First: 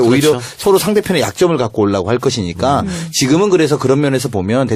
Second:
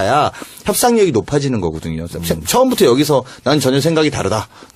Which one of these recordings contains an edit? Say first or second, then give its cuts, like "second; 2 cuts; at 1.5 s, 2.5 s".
first; 1 cut; at 1.7 s